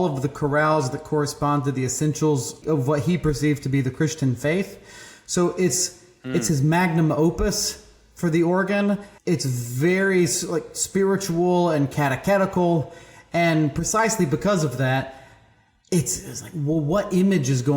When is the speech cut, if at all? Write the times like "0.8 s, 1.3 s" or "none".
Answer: 2.6 s, 9.1 s